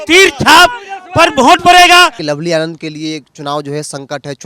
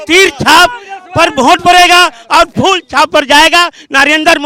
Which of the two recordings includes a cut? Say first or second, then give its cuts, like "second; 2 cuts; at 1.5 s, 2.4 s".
first; 1 cut; at 2.2 s